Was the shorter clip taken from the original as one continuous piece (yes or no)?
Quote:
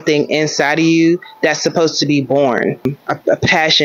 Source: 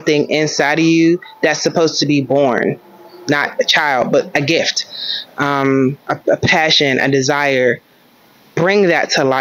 no